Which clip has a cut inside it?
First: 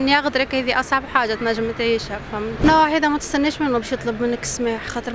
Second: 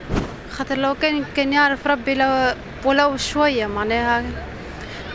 first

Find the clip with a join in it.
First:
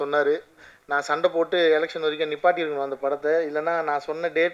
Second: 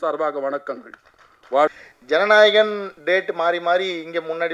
second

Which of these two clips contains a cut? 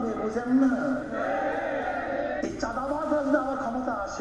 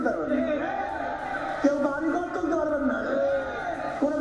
first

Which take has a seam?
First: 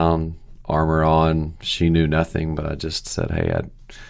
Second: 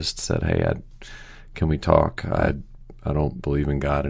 second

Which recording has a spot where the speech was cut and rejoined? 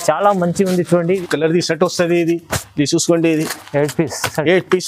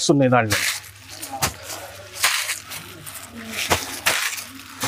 first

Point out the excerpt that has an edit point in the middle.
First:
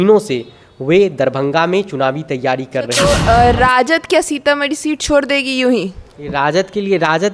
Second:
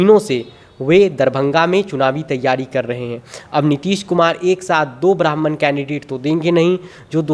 first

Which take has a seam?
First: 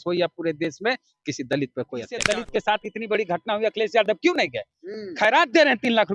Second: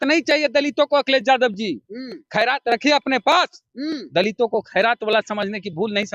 first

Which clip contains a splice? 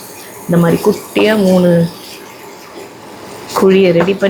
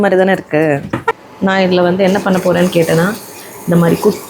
second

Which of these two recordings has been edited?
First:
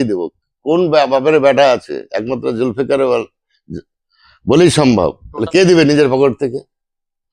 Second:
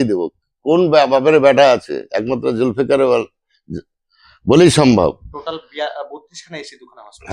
first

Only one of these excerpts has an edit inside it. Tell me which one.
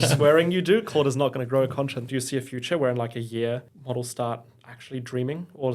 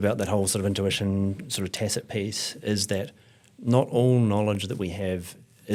first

